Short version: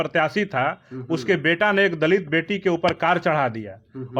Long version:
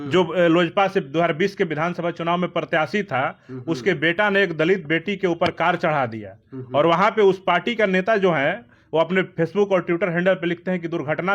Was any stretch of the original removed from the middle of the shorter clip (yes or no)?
no